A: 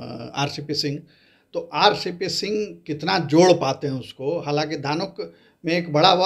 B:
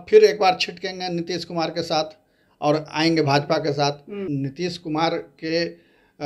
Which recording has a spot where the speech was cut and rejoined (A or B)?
B